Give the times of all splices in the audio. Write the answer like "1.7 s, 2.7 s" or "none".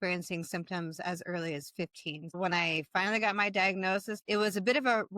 2.4 s, 4.1 s